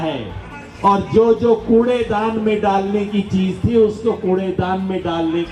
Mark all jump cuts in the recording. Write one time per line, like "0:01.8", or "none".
none

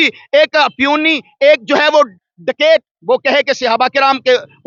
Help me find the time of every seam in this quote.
none

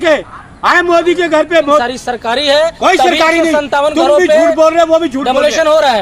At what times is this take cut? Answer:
0:01.8

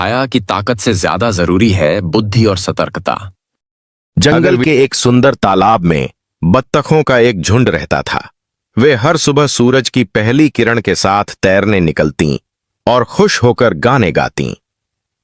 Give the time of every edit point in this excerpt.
0:04.1

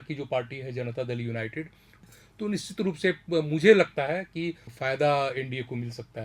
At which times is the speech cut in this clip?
0:01.9
0:04.7

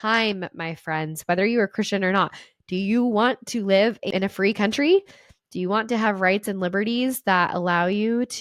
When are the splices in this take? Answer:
none

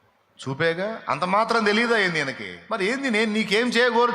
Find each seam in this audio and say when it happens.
0:03.1

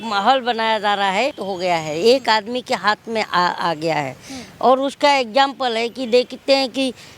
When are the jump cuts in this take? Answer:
0:01.4

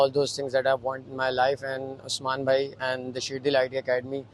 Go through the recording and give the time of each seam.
none

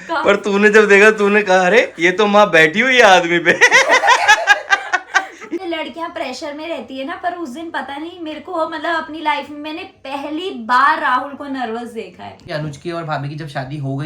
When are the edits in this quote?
0:05.6
0:12.4

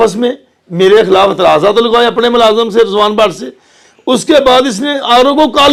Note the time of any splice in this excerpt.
none

